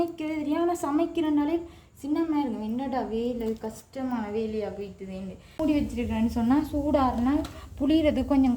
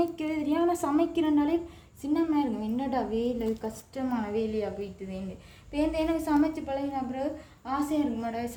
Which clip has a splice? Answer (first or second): first